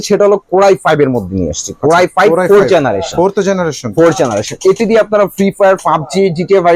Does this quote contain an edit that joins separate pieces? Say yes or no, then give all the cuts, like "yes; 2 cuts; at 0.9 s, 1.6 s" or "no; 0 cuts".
no; 0 cuts